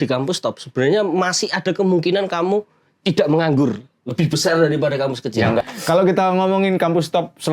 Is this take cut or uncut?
cut